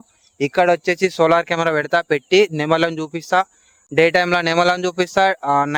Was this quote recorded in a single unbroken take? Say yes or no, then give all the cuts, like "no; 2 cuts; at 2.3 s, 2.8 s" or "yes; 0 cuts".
yes; 0 cuts